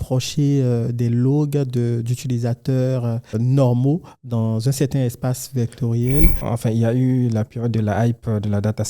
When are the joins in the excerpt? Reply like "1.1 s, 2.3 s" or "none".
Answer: 3.3 s, 6.4 s